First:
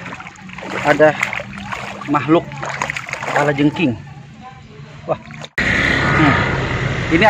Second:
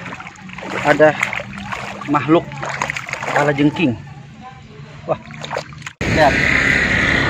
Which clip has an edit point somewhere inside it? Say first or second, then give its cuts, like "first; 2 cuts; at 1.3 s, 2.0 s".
first; 1 cut; at 5.5 s